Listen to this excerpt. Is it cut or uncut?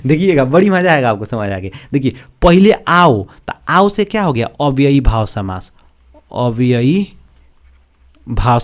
uncut